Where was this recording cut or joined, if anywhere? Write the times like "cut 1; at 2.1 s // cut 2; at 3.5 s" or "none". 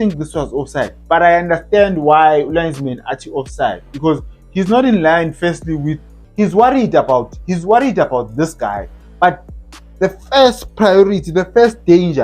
cut 1; at 6.2 s